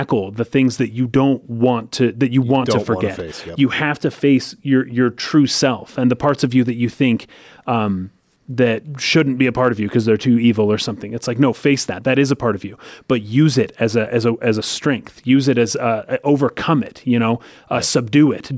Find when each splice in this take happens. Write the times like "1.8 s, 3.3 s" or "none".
none